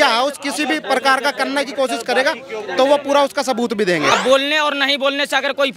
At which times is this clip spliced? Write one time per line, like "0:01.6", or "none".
0:04.1